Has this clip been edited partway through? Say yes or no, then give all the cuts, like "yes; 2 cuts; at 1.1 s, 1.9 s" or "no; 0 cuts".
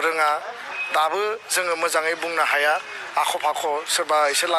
no; 0 cuts